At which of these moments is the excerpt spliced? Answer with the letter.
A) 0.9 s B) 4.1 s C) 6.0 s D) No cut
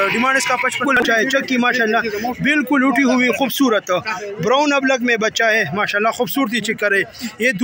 A